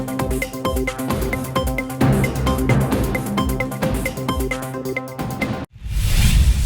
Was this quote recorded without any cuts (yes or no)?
no